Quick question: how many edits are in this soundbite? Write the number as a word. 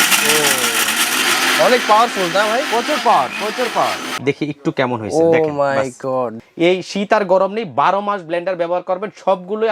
three